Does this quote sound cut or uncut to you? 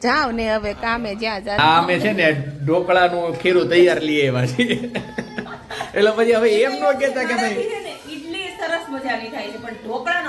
cut